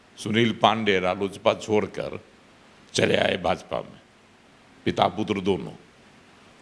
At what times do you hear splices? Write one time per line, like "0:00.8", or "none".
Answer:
none